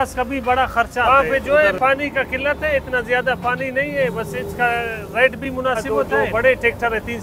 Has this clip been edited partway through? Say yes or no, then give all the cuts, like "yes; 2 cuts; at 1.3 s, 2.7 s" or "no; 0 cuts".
yes; 2 cuts; at 1.0 s, 5.9 s